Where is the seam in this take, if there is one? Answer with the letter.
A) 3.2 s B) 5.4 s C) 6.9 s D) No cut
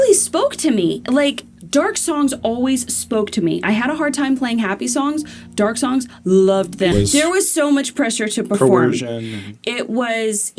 C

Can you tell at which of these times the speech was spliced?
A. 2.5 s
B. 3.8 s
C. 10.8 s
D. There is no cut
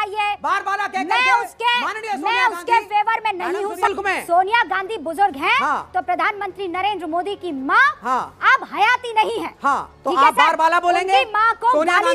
B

